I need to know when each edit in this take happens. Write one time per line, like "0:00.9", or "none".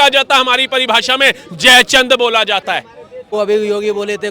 0:03.3

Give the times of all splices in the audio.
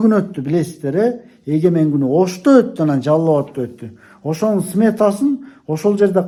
none

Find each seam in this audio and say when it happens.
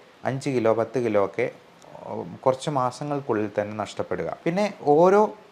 0:04.3

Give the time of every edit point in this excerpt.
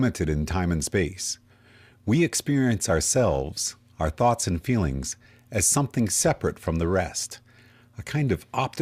0:05.0

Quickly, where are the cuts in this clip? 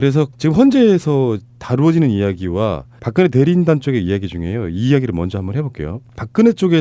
0:01.8

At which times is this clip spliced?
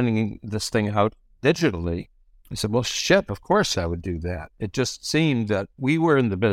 0:03.7
0:05.7

